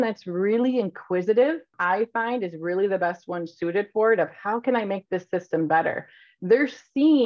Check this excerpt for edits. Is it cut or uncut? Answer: cut